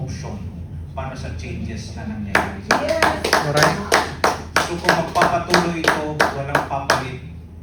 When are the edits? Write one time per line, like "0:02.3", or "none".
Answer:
none